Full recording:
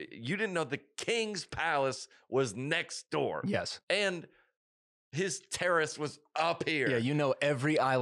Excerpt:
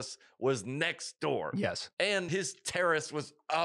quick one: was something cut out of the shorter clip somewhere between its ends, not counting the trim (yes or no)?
yes